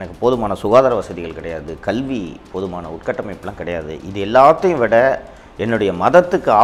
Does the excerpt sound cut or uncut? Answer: uncut